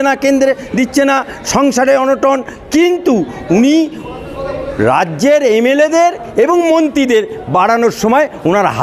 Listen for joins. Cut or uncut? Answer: uncut